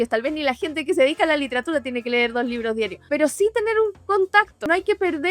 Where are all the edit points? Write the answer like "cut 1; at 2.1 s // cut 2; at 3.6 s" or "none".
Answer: cut 1; at 3.0 s // cut 2; at 4.4 s